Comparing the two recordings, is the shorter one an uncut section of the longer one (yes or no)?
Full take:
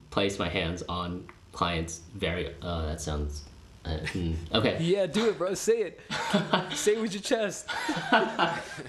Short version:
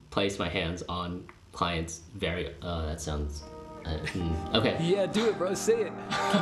yes